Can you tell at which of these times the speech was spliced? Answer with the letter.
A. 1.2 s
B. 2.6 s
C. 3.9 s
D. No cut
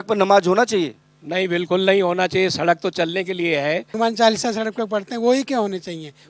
C